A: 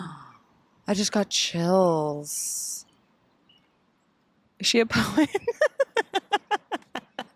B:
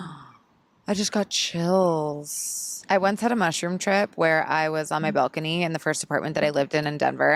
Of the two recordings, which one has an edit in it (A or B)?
B